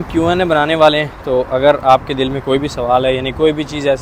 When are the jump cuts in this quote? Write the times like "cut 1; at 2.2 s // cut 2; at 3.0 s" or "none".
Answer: none